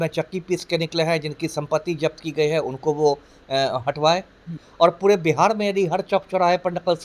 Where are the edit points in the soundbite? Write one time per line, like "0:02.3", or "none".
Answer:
0:04.6